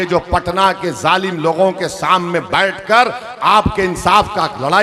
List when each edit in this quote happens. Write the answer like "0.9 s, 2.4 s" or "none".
none